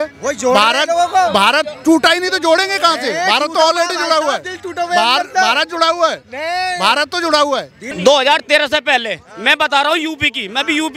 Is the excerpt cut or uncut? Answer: cut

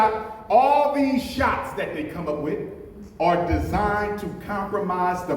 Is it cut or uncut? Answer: uncut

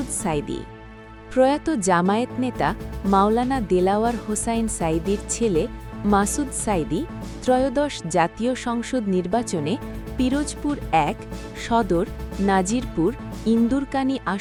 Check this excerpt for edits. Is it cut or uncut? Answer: uncut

